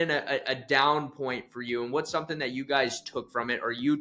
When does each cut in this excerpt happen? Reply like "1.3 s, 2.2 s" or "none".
none